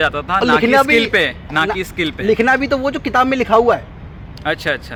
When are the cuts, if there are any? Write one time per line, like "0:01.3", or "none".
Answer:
none